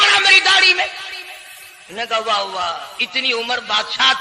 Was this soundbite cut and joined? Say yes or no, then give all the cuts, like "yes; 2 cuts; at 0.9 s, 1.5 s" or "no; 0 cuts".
no; 0 cuts